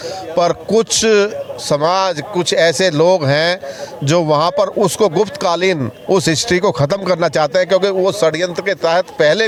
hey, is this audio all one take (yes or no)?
yes